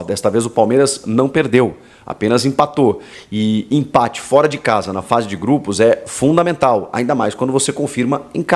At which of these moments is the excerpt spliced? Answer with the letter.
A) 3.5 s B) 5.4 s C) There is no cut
C